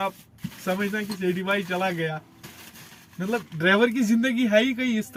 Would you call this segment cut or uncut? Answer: uncut